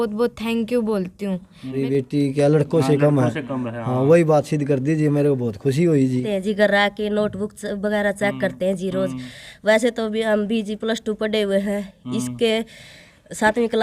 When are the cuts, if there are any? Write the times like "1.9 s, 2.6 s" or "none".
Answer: 1.8 s, 6.2 s